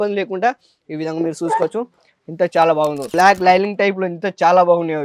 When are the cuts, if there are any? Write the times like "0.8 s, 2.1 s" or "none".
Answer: 3.0 s